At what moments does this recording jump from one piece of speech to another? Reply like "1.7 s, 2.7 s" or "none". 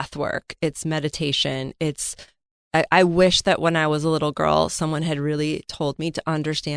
none